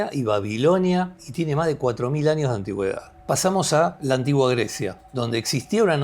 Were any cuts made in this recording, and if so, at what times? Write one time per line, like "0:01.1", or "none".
0:01.2
0:03.1
0:04.0
0:05.0